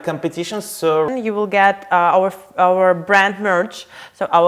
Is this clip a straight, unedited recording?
no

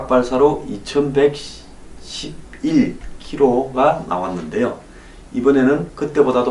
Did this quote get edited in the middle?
no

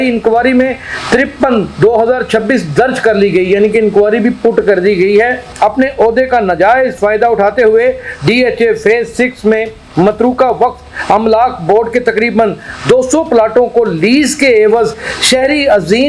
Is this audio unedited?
no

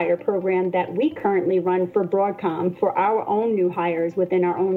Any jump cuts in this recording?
no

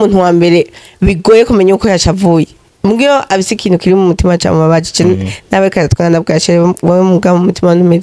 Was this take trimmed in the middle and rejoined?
no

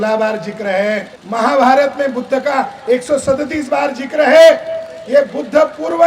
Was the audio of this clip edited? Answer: yes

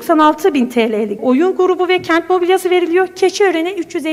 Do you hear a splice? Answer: yes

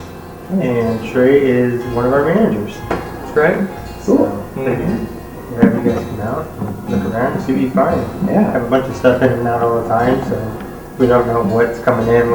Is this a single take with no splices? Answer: yes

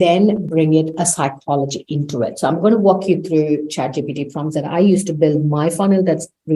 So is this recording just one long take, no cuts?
yes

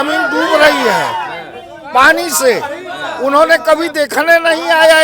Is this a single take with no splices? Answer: yes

